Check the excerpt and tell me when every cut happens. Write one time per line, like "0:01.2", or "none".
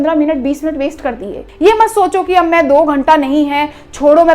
0:01.4